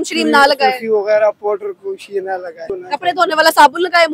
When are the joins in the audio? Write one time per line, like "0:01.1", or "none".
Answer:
0:02.7